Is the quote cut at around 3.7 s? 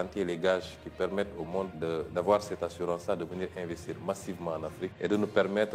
no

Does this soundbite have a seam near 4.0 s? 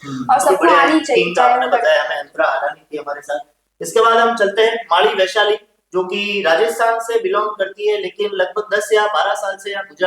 no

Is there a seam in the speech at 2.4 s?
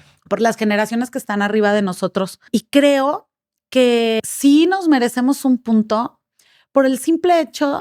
yes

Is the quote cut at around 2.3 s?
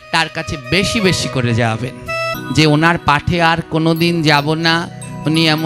yes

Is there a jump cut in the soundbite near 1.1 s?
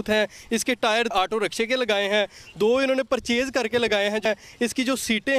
yes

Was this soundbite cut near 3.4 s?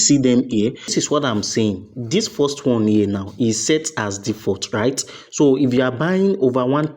no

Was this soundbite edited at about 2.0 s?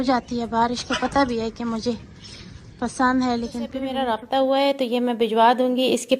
no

